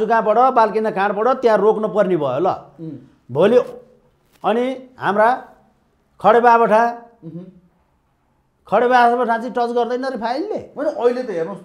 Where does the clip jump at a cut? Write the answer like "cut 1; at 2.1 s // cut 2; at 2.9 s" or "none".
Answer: none